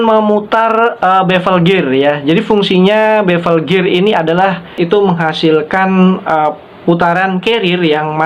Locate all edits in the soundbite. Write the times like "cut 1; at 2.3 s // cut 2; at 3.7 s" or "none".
cut 1; at 4.7 s